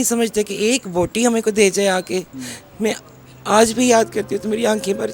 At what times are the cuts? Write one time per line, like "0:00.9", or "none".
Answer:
none